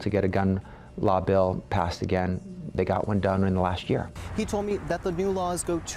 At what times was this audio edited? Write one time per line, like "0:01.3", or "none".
0:04.1